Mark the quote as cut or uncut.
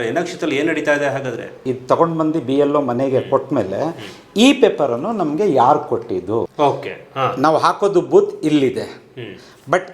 cut